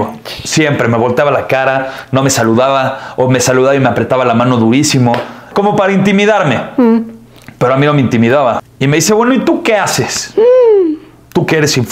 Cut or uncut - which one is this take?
cut